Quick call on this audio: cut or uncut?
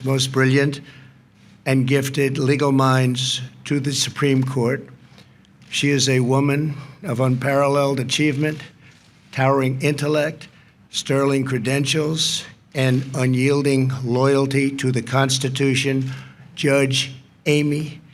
uncut